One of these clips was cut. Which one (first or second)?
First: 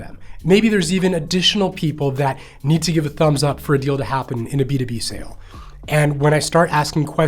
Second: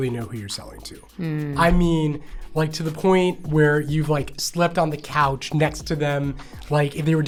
first